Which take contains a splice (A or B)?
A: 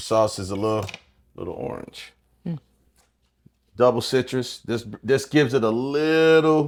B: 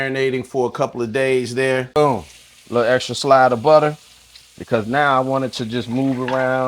B